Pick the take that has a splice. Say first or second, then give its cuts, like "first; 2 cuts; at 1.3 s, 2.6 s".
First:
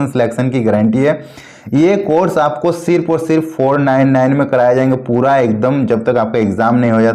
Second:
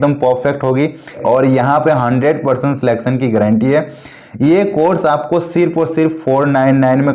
second; 1 cut; at 1.2 s